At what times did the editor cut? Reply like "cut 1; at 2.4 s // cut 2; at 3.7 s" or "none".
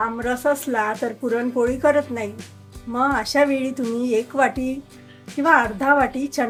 none